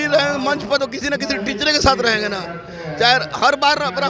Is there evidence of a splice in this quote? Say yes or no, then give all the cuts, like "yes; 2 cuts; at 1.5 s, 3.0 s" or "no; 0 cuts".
no; 0 cuts